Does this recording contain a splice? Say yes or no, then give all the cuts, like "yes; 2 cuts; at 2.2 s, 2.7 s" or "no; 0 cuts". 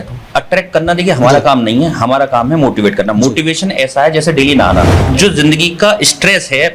yes; 1 cut; at 5.0 s